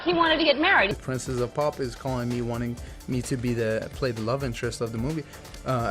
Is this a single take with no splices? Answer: no; 1 cut; at 1.0 s

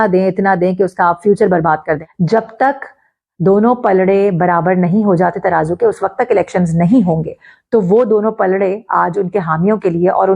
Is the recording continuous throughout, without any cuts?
no; 1 cut; at 2.1 s

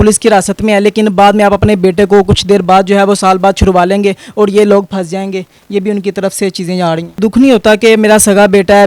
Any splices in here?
yes; 1 cut; at 7.2 s

